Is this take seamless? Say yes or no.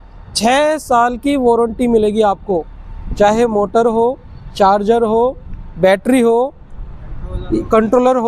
yes